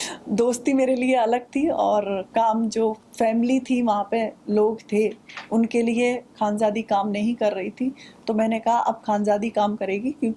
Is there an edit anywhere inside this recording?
no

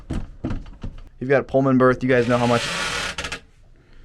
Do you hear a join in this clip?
yes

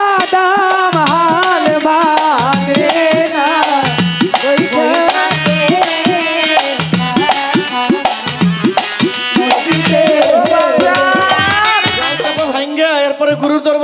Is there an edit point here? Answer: yes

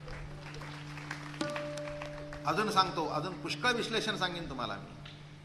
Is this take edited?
no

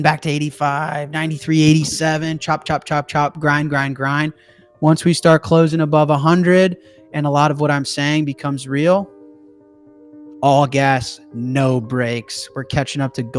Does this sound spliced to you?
no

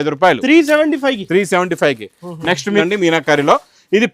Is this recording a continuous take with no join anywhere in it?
no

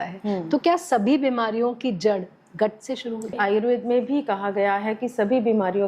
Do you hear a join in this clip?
yes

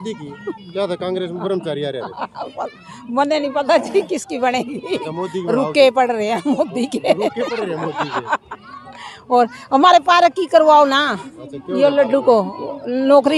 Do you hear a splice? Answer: no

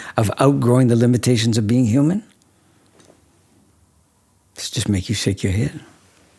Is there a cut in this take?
yes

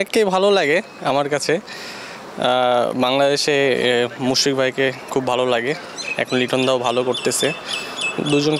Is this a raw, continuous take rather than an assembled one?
yes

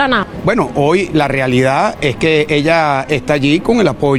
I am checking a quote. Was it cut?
no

